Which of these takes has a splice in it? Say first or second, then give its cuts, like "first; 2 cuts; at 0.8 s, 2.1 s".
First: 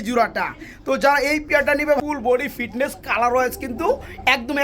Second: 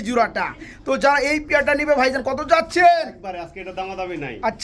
first; 1 cut; at 2.0 s